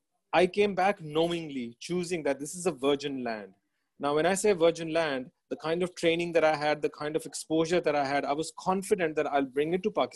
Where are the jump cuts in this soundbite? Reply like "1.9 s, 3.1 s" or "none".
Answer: none

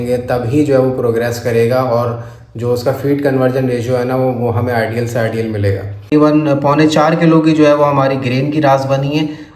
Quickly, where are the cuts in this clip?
6.1 s

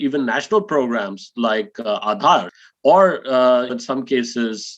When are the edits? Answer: 2.6 s, 3.7 s

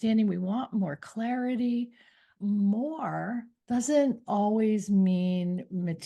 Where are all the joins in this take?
2.3 s, 3.5 s

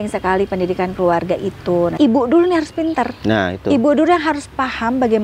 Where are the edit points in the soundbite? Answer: 1.9 s

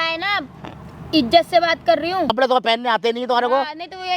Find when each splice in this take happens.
2.3 s

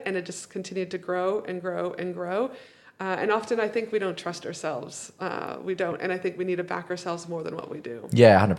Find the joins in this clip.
none

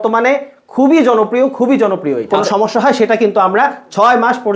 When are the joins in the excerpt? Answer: 2.3 s

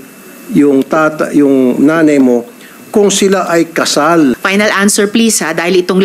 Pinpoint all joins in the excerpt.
4.4 s

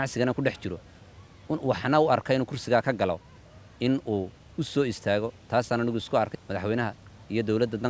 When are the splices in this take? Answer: 6.4 s

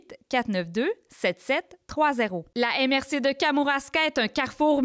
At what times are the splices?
2.5 s

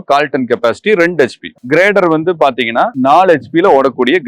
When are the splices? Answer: 1.5 s, 2.9 s

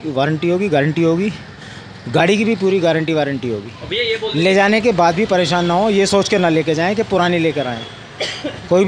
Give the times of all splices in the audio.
none

